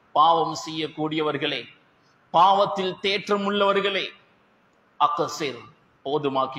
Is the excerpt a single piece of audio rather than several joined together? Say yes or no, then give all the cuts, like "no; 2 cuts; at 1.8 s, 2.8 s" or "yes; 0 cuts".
yes; 0 cuts